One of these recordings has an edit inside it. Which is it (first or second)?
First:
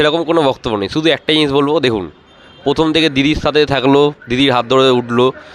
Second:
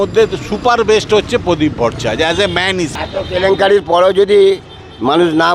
second